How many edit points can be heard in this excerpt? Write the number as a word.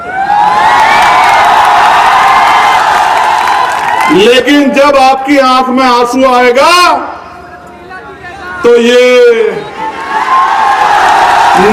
zero